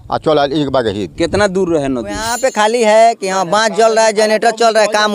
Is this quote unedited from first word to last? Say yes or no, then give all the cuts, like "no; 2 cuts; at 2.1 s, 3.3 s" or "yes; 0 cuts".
no; 1 cut; at 2.2 s